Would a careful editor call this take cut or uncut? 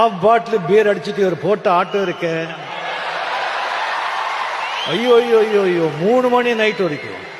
uncut